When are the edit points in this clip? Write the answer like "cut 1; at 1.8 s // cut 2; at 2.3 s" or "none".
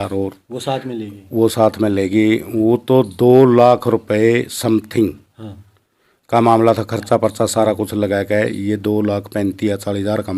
none

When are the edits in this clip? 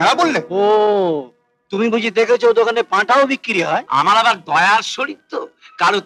cut 1; at 3.9 s

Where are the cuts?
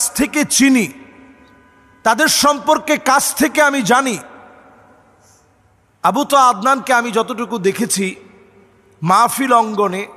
none

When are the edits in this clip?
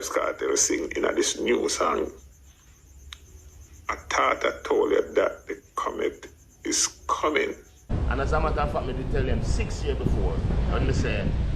cut 1; at 7.9 s

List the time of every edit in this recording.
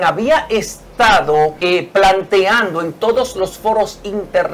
cut 1; at 1.6 s

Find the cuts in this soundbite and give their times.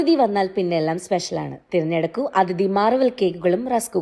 none

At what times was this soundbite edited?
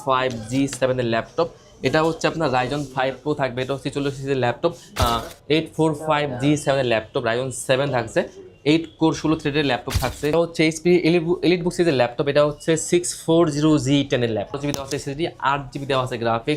cut 1; at 5.0 s // cut 2; at 10.3 s // cut 3; at 14.6 s

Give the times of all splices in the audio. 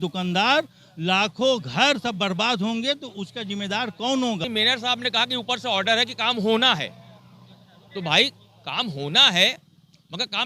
cut 1; at 4.5 s

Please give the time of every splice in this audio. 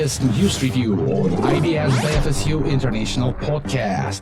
none

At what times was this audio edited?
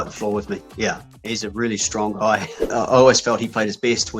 cut 1; at 1.1 s // cut 2; at 2.7 s

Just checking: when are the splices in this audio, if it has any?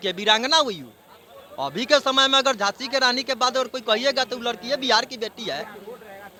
none

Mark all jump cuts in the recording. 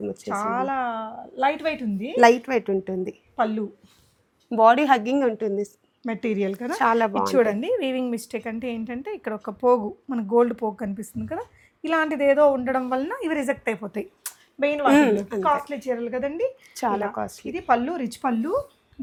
none

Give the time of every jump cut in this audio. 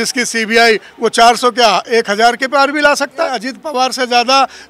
cut 1; at 3.5 s

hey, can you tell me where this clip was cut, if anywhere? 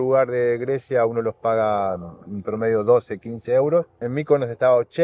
cut 1; at 4.1 s

